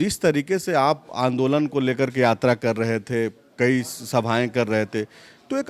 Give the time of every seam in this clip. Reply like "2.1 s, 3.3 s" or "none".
none

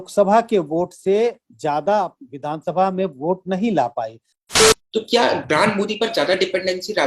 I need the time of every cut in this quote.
4.4 s

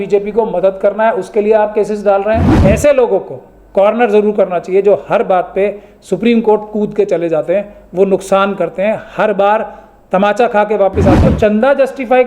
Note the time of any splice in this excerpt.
2.5 s, 11.2 s

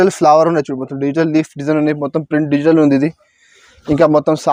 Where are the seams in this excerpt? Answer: none

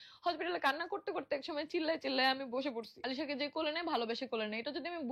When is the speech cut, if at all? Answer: 3.0 s

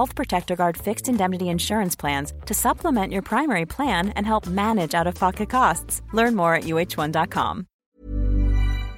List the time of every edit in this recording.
7.7 s

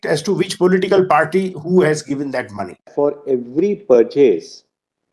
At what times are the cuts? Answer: 2.9 s

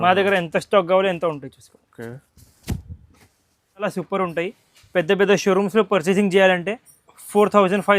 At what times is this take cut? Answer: 3.8 s

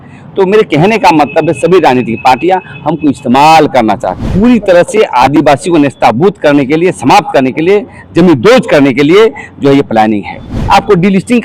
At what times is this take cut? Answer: 4.2 s, 10.5 s

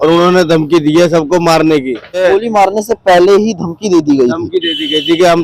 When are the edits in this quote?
2.2 s

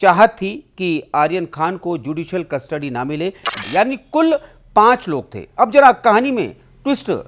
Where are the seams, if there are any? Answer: 3.5 s

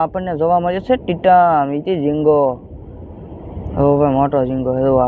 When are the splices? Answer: none

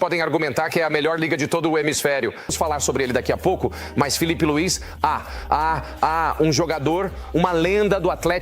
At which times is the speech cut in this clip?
2.4 s

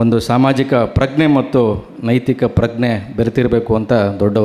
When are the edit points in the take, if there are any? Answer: none

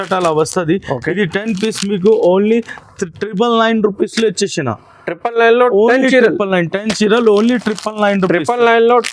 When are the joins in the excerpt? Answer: none

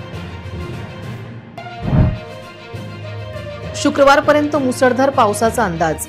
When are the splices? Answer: 1.2 s

